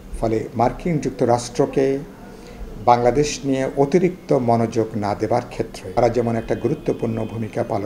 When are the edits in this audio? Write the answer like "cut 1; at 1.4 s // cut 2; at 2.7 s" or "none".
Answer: cut 1; at 6.0 s